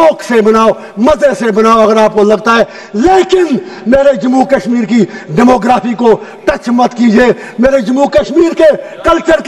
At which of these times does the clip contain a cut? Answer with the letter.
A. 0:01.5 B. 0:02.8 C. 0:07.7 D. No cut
D